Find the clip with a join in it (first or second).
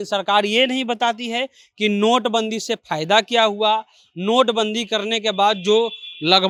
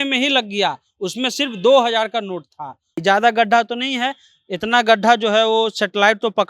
second